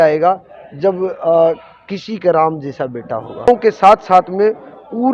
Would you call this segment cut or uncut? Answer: cut